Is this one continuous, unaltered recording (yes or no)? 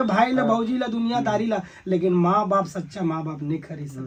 yes